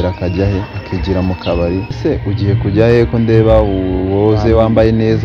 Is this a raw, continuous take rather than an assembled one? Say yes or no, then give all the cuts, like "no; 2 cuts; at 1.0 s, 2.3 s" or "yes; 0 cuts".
no; 1 cut; at 1.9 s